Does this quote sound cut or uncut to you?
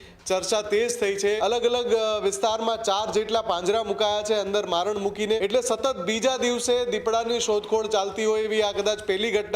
cut